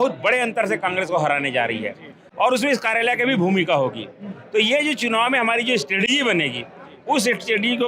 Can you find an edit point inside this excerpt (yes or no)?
no